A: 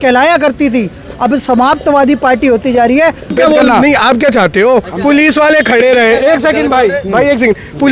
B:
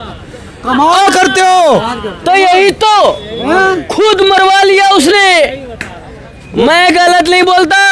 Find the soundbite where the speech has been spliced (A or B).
A